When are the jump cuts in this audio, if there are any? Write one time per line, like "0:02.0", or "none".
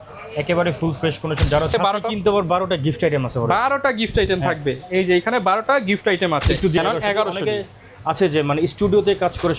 0:01.7
0:06.8